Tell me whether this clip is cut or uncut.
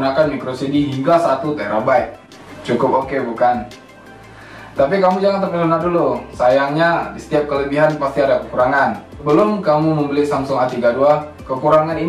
cut